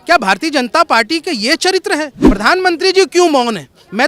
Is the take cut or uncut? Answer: cut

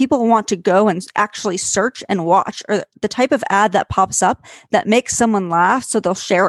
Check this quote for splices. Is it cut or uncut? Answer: uncut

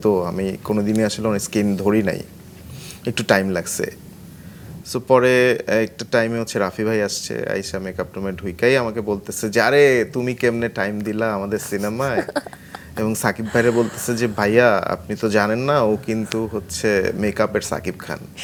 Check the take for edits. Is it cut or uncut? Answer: uncut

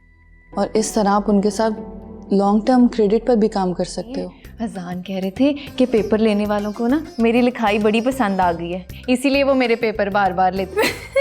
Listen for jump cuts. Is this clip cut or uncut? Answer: cut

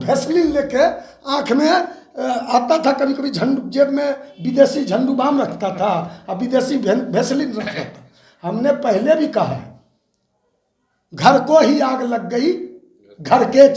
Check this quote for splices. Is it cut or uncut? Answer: uncut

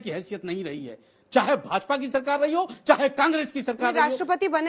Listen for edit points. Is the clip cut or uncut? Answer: uncut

